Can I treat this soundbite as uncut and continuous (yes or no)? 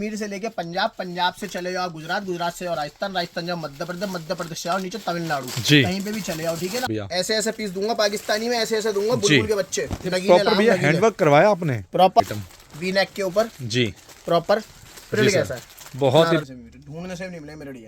no